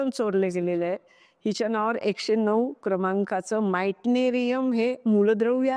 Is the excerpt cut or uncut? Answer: uncut